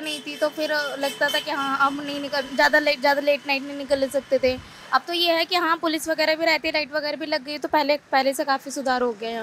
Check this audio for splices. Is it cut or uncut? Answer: uncut